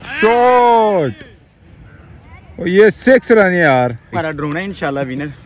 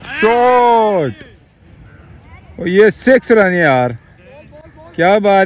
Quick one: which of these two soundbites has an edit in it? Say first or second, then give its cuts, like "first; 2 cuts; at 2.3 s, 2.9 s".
first; 1 cut; at 4.2 s